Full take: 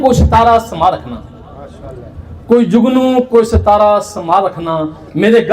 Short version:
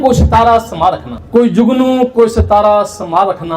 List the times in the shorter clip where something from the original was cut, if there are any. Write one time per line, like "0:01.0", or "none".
0:01.1